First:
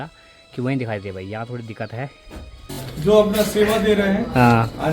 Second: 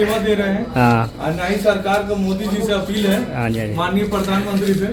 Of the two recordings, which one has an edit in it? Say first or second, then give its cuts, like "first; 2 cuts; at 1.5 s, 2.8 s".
first; 1 cut; at 2.7 s